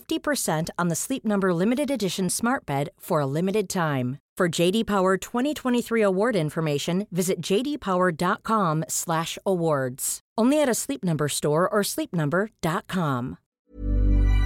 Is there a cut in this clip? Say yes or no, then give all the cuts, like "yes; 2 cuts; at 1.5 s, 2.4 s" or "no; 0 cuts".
yes; 1 cut; at 13.4 s